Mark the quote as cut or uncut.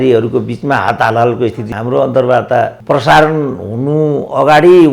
cut